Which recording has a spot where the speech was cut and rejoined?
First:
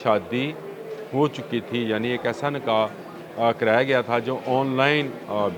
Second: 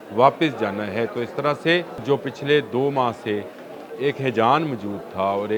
second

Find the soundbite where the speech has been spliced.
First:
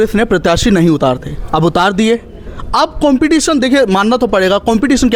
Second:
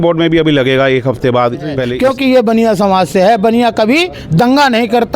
second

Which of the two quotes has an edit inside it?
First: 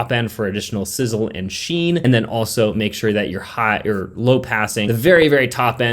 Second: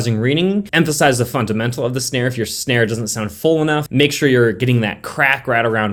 first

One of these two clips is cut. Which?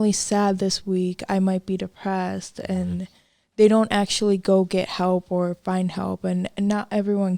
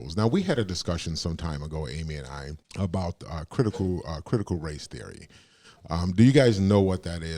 second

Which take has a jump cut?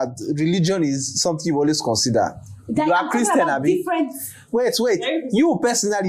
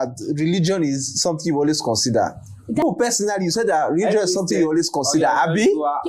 second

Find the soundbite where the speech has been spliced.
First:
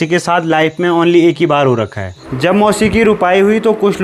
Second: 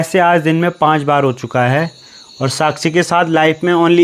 first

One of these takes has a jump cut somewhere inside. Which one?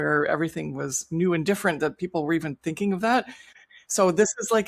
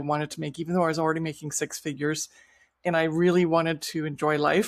first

